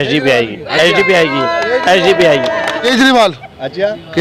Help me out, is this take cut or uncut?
cut